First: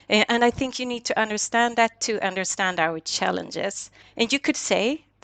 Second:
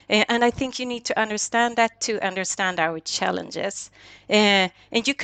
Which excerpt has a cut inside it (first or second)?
first